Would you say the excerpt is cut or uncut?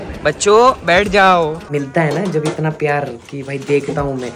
cut